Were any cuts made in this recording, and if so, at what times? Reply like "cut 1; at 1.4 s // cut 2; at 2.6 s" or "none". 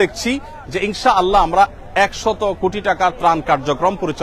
none